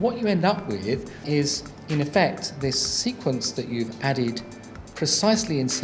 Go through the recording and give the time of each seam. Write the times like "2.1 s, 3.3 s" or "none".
1.2 s